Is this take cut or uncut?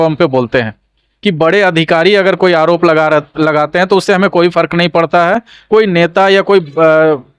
uncut